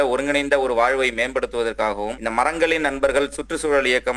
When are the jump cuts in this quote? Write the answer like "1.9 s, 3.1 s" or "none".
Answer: 2.2 s